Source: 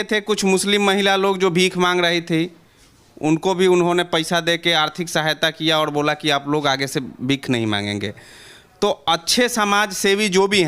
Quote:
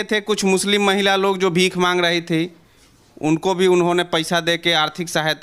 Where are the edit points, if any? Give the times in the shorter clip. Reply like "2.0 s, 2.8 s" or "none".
none